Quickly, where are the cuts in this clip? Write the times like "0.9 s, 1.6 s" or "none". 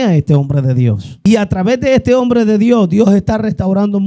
1.1 s